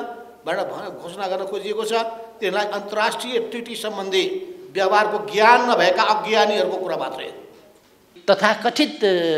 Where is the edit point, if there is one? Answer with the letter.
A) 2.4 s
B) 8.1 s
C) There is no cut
B